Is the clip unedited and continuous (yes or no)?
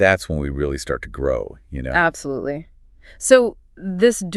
yes